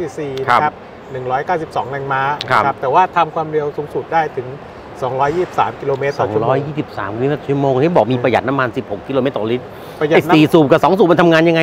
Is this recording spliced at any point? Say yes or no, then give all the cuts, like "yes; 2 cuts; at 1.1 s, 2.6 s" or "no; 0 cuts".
no; 0 cuts